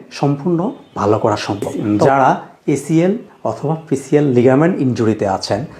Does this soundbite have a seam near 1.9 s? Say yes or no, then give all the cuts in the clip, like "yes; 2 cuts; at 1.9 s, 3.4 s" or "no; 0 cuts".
yes; 1 cut; at 1.9 s